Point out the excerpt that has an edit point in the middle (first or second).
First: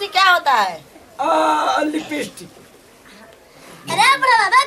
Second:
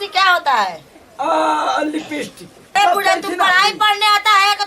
second